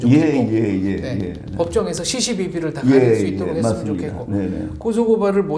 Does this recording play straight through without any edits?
yes; 0 cuts

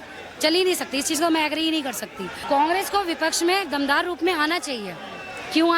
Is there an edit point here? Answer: yes; 1 cut; at 2.3 s

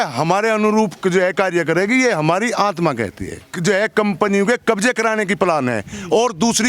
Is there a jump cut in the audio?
yes; 1 cut; at 3.5 s

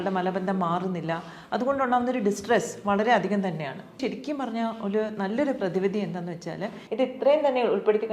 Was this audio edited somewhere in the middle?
yes; 2 cuts; at 4.0 s, 6.8 s

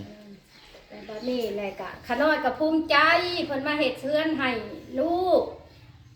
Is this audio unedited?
yes; 0 cuts

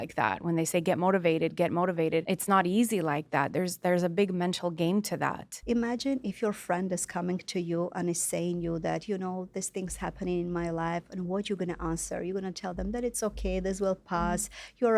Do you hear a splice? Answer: yes; 2 cuts; at 2.2 s, 5.5 s

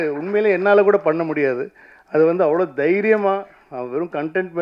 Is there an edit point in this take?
no; 0 cuts

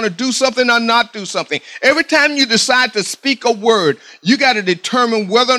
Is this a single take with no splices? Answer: yes; 0 cuts

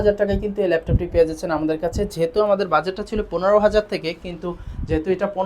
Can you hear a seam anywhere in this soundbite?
no; 0 cuts

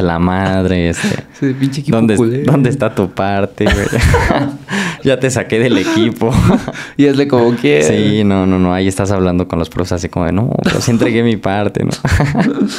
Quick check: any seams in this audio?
no; 0 cuts

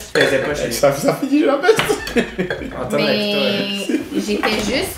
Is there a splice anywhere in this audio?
no; 0 cuts

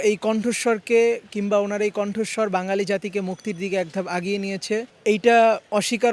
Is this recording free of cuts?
yes; 0 cuts

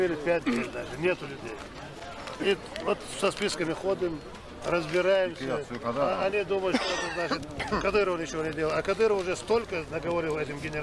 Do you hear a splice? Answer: no; 0 cuts

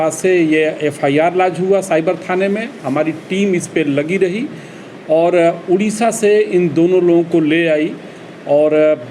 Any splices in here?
no; 0 cuts

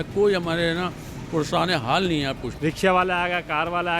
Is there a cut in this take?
yes; 1 cut; at 2.5 s

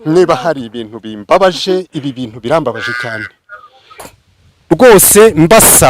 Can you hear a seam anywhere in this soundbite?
yes; 1 cut; at 4.0 s

